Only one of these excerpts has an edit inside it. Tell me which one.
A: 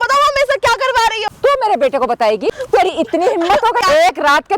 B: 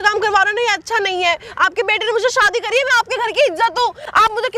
A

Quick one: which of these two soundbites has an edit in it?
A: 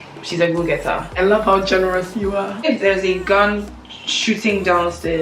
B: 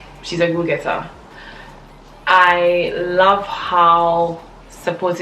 A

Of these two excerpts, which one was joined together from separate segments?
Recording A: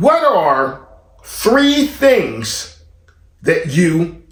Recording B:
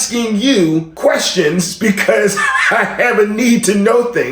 B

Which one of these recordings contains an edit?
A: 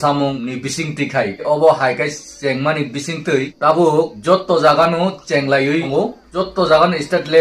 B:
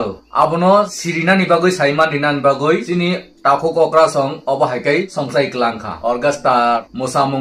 A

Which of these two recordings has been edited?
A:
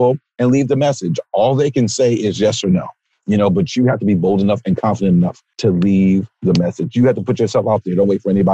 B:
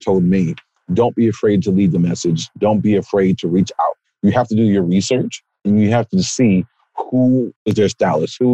B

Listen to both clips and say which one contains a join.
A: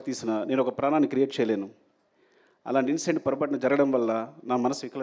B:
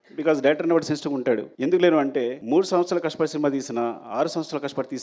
B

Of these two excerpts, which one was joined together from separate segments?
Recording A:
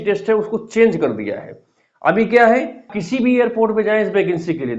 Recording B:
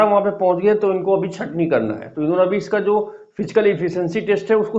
A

